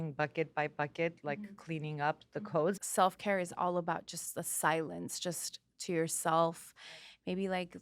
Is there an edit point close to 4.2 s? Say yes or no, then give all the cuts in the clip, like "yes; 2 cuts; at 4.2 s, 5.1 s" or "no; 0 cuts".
no; 1 cut; at 2.8 s